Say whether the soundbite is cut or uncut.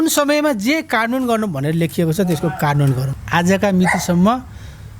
cut